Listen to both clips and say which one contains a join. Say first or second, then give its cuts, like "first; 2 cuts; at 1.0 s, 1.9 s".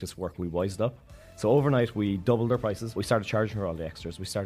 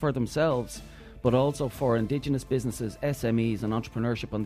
first; 1 cut; at 2.9 s